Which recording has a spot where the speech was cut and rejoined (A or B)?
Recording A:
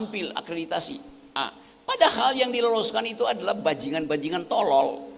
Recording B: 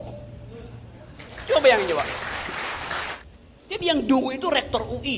B